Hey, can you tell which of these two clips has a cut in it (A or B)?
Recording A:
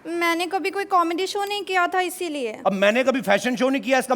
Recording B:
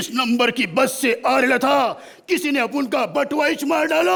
A